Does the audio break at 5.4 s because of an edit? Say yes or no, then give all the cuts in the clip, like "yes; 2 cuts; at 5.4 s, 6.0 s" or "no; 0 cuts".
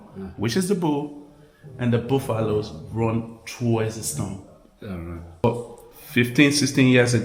yes; 1 cut; at 5.4 s